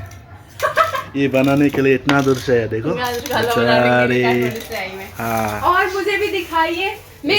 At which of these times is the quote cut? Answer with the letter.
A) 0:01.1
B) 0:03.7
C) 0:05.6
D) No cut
C